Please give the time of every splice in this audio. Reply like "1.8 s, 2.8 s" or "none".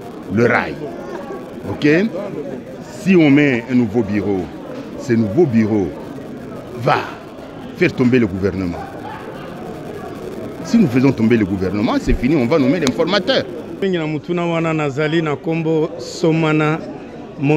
13.8 s